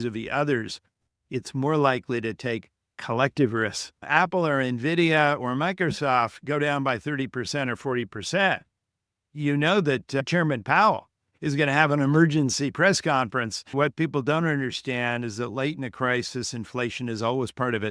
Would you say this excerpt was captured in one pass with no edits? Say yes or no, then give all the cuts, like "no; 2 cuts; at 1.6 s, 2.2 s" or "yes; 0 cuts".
no; 3 cuts; at 3.9 s, 10.2 s, 13.7 s